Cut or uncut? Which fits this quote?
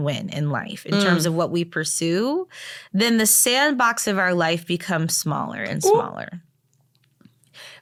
uncut